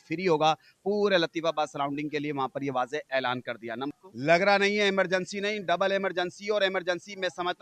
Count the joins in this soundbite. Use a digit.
1